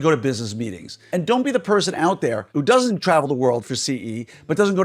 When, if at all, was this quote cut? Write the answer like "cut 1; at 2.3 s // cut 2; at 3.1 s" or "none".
cut 1; at 1.0 s // cut 2; at 2.4 s